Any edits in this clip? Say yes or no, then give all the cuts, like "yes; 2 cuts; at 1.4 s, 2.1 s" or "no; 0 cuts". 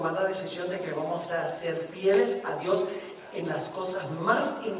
no; 0 cuts